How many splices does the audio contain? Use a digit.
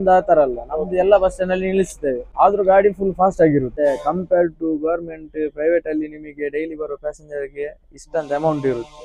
2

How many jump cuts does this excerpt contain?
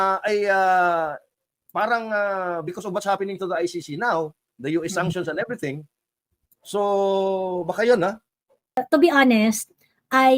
1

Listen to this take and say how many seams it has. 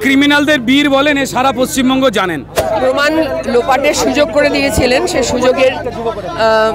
1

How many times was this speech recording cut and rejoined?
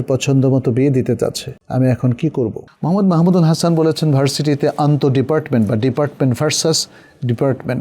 1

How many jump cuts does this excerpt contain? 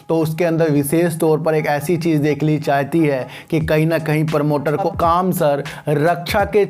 1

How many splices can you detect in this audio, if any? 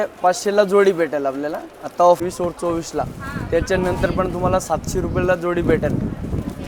1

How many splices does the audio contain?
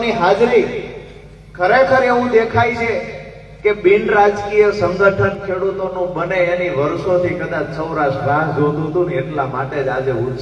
0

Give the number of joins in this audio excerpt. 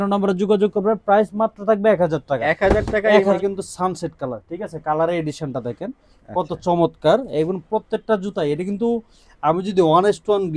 1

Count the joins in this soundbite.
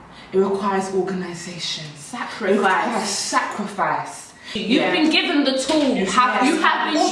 1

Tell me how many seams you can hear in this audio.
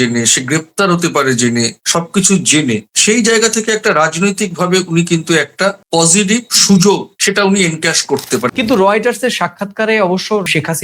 2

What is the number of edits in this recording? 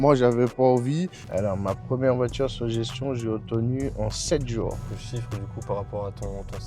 2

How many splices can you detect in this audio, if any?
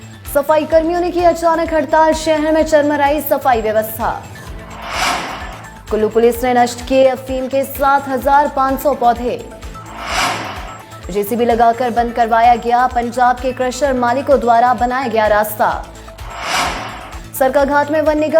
3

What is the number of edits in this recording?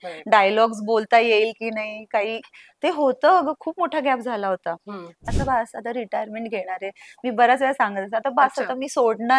1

